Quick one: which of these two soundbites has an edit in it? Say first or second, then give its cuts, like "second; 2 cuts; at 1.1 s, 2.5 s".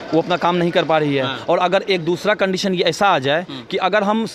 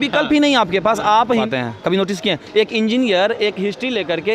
second; 1 cut; at 1.5 s